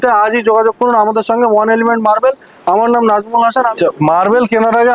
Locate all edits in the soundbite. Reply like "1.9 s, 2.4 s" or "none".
3.7 s